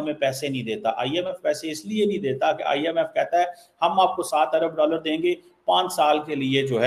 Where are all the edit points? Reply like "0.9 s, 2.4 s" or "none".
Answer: none